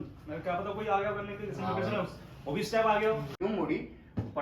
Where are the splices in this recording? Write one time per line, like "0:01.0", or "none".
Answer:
0:03.4